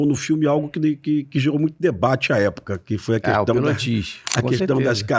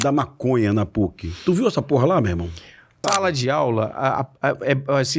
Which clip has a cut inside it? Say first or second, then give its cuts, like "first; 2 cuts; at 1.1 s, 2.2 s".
second; 1 cut; at 3.0 s